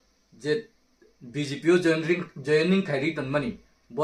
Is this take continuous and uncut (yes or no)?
yes